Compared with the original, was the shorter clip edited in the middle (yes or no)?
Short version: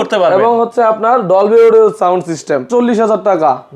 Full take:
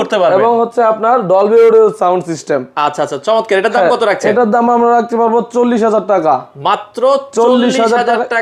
yes